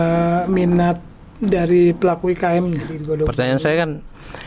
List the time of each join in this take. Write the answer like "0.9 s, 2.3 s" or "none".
3.0 s